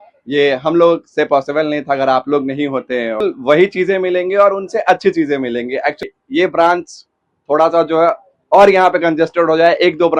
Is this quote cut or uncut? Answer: cut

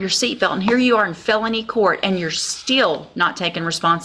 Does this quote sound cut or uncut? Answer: uncut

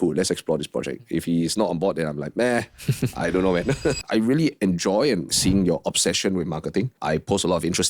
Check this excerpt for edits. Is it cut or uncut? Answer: cut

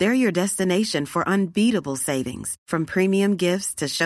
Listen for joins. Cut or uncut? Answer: uncut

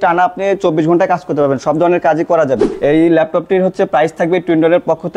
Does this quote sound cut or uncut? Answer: cut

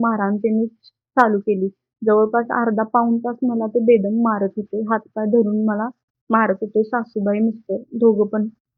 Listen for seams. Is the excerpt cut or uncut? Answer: uncut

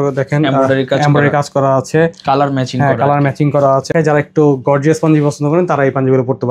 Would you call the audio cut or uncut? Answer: cut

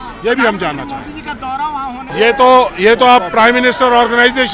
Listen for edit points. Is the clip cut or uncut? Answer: uncut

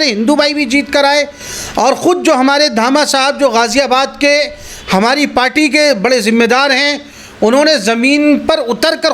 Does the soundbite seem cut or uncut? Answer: uncut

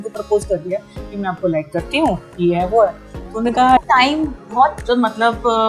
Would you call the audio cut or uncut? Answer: cut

